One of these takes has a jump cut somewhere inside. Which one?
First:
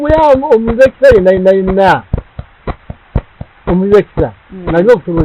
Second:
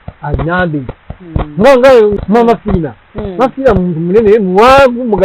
second; 1 cut; at 2.3 s

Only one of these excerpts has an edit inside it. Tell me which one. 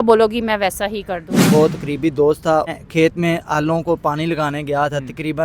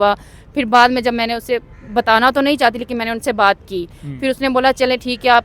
first; 2 cuts; at 1.3 s, 2.8 s

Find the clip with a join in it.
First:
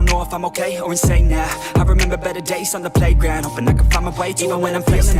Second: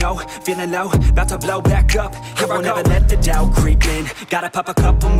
first; 1 cut; at 1.0 s

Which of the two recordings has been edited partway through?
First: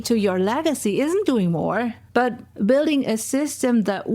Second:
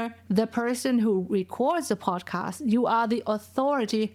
first; 1 cut; at 2.5 s

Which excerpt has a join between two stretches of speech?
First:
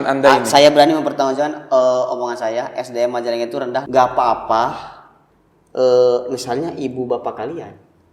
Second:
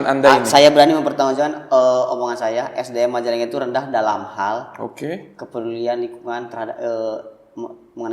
first; 1 cut; at 3.9 s

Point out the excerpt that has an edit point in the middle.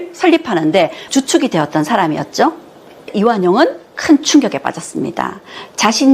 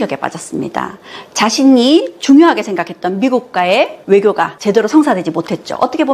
first; 1 cut; at 3.1 s

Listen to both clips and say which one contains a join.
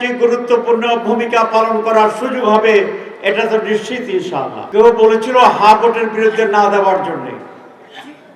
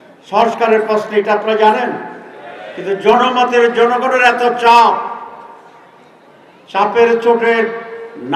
first; 1 cut; at 4.6 s

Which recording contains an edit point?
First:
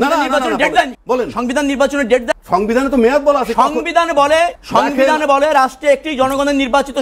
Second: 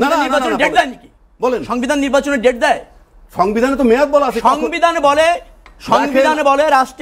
first; 3 cuts; at 1.0 s, 2.3 s, 4.6 s

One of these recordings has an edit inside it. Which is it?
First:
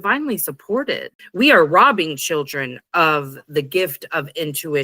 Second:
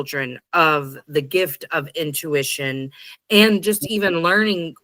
first; 1 cut; at 1.1 s

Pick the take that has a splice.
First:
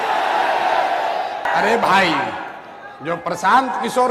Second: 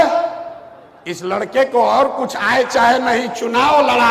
first; 1 cut; at 1.5 s

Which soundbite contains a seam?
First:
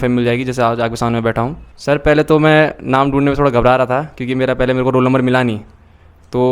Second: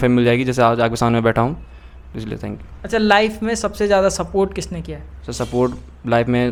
first; 1 cut; at 1.7 s

